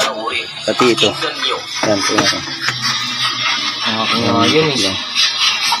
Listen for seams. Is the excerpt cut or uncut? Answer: uncut